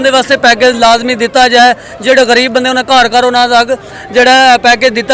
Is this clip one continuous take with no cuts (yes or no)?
yes